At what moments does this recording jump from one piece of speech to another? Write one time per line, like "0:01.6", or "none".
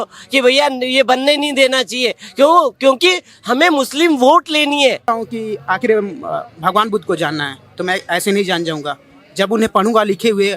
0:05.0